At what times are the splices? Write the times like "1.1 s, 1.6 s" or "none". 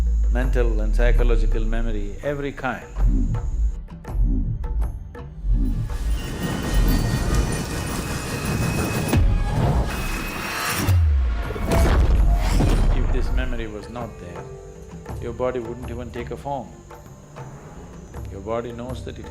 17.1 s

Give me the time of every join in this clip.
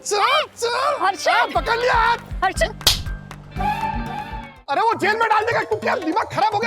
4.6 s

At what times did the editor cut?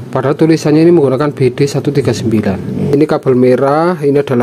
2.9 s

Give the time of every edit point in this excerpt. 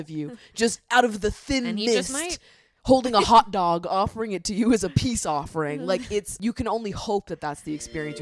6.3 s

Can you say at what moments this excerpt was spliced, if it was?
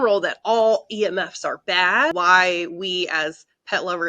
2.1 s

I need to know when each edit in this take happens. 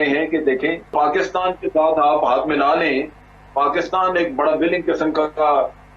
0.9 s

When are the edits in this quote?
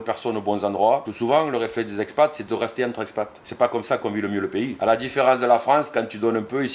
1.1 s, 3.4 s, 4.7 s

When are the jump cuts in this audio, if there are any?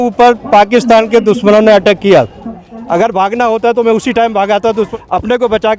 2.4 s, 4.9 s

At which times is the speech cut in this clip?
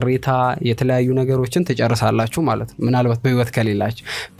none

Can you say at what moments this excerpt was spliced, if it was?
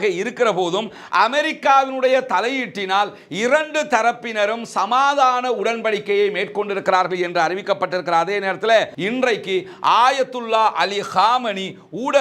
9.0 s

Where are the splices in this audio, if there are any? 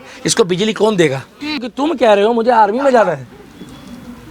1.7 s

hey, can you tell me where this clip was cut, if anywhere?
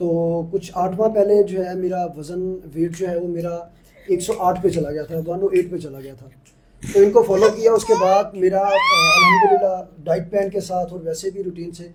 none

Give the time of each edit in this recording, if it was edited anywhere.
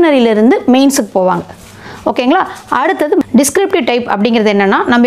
3.2 s

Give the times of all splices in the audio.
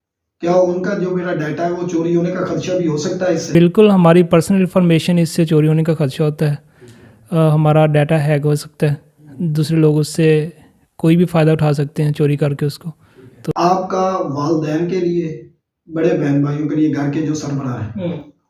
13.5 s

